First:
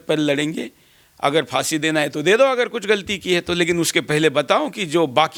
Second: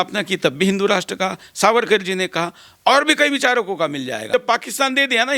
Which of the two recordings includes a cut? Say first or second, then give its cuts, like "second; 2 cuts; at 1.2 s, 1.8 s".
second; 1 cut; at 4.2 s